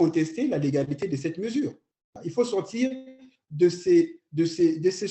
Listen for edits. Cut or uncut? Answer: cut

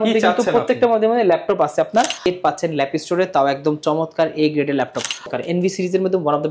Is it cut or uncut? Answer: cut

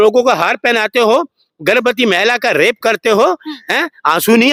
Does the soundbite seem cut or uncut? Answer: uncut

